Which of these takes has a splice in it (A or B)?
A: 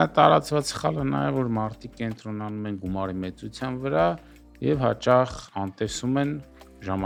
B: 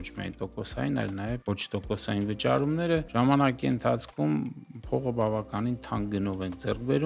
B